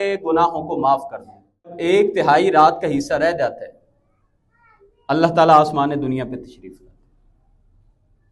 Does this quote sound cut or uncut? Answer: cut